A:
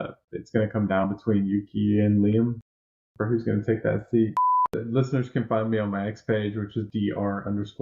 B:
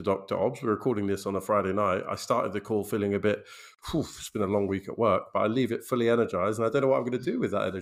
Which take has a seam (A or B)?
A